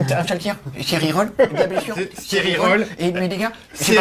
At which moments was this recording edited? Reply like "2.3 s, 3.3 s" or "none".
none